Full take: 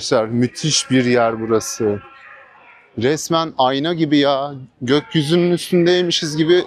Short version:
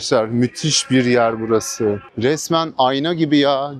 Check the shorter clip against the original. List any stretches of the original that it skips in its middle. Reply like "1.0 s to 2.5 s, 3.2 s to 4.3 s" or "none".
2.1 s to 2.9 s